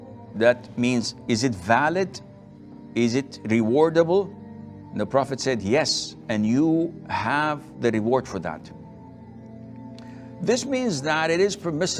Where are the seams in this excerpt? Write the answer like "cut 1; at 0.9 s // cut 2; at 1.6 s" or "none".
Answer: cut 1; at 9.0 s // cut 2; at 10.4 s